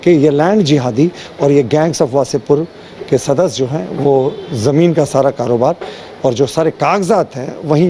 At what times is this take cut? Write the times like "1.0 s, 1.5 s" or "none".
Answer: none